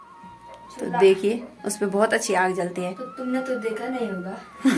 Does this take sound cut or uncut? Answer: uncut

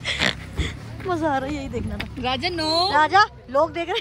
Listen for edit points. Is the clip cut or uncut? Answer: uncut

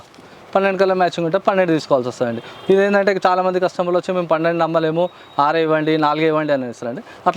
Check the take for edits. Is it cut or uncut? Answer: uncut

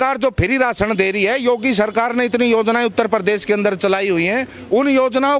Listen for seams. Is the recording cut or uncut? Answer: uncut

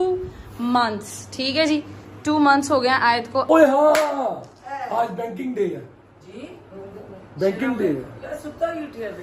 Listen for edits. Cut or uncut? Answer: cut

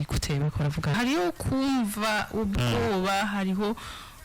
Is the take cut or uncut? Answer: cut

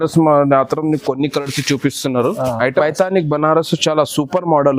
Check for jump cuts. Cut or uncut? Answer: cut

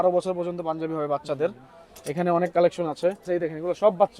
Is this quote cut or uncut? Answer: cut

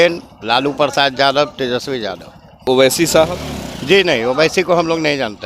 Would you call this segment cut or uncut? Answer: cut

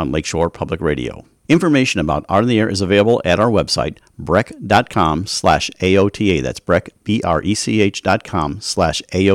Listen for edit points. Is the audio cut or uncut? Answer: cut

